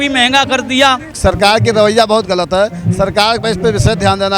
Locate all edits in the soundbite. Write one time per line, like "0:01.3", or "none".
0:01.1